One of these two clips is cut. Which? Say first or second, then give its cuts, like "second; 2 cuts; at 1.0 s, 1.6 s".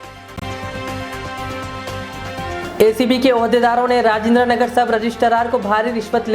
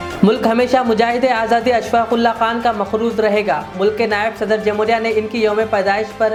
first; 1 cut; at 2.6 s